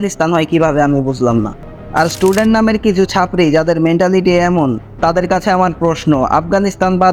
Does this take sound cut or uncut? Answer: uncut